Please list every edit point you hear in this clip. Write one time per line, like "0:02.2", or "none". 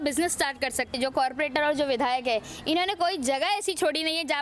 0:01.1